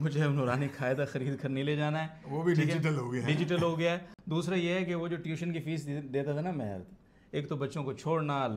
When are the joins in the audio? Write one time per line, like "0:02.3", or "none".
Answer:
none